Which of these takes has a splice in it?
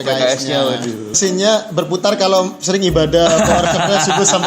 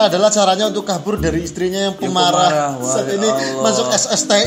first; 1 cut; at 1.1 s

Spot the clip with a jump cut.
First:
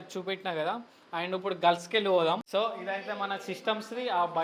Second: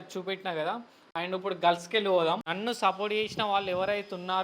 second; 1 cut; at 2.4 s

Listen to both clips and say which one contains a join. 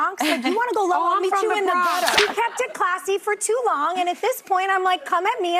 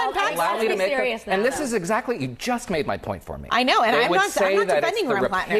first; 1 cut; at 2.2 s

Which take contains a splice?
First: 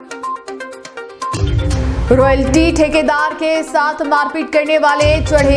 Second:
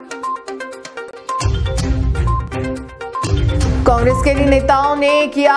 second; 1 cut; at 1.0 s

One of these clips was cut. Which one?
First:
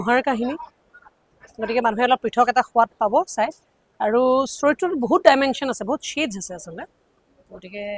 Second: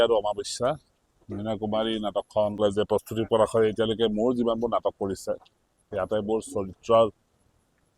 second; 1 cut; at 2.6 s

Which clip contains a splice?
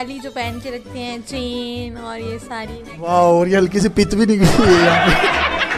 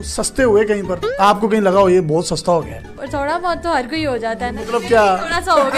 second; 1 cut; at 2.8 s

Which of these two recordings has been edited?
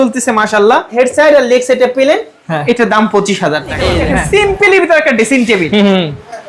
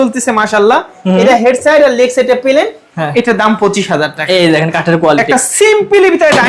first; 2 cuts; at 0.9 s, 3.9 s

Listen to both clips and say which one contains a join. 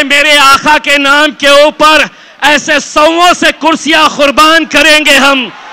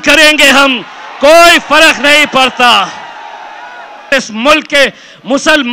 second; 1 cut; at 4.1 s

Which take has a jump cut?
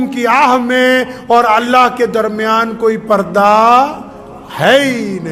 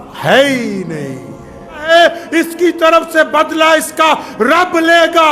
second; 1 cut; at 1.9 s

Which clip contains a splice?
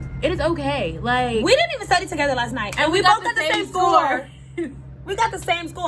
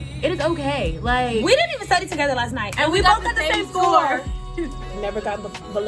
second; 1 cut; at 4.9 s

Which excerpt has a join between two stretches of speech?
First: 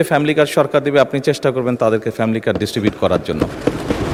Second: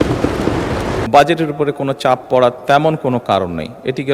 second; 1 cut; at 1.0 s

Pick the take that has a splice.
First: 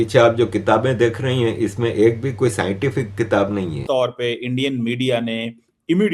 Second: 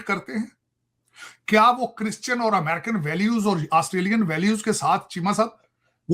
first; 1 cut; at 3.8 s

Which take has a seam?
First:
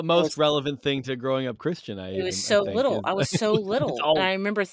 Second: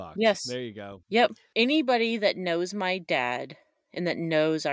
second; 1 cut; at 1.4 s

